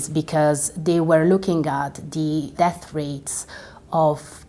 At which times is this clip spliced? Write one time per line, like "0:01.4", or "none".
0:02.5